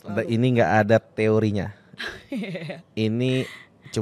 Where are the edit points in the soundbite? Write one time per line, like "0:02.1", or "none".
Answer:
none